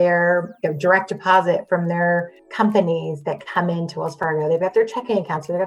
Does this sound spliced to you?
yes; 1 cut; at 2.4 s

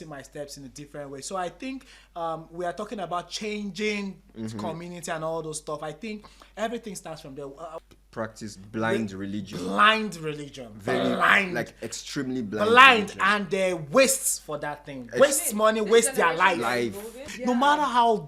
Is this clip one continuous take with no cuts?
no; 2 cuts; at 7.8 s, 17.3 s

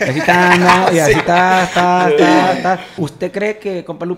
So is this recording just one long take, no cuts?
no; 1 cut; at 3.0 s

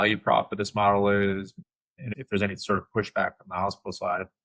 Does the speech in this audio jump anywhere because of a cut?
yes; 1 cut; at 2.0 s

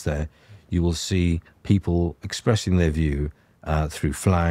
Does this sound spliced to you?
no; 0 cuts

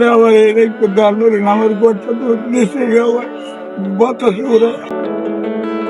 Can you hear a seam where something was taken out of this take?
yes; 1 cut; at 4.9 s

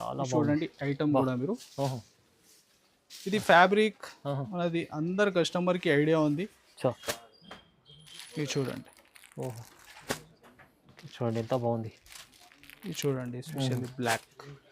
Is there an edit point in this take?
yes; 1 cut; at 7.1 s

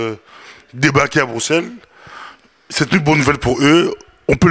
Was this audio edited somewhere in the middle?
no; 0 cuts

